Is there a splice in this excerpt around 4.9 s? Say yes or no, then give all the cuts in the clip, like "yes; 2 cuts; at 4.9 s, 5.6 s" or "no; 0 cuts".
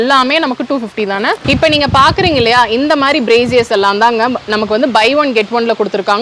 no; 1 cut; at 1.4 s